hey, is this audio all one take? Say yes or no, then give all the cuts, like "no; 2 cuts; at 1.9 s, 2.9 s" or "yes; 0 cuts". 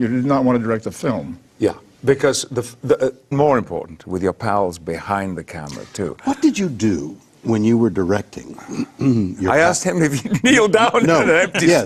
yes; 0 cuts